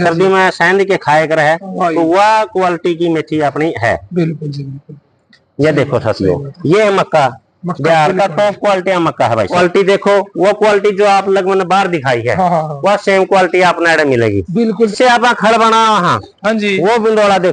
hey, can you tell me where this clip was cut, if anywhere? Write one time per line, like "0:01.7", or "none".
0:09.5
0:14.9